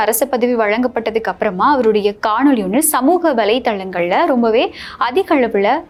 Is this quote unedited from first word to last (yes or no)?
yes